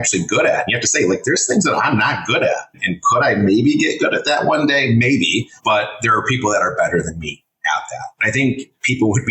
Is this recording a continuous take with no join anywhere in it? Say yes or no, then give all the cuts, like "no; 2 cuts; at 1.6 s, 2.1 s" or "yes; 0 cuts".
no; 3 cuts; at 2.8 s, 5.5 s, 8.1 s